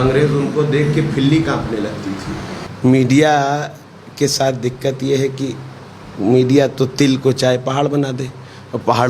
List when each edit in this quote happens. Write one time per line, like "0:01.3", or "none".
0:02.6